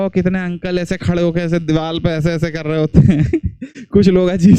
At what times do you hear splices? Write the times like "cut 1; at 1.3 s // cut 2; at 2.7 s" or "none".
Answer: none